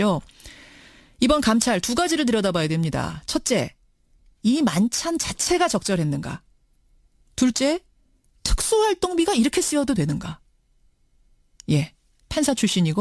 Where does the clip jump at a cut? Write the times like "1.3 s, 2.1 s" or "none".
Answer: 3.1 s